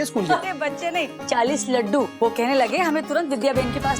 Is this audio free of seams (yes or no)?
no